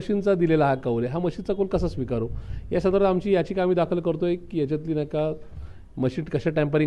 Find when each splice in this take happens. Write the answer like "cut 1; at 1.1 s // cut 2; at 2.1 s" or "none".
none